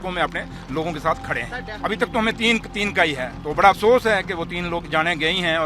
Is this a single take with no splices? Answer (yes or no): no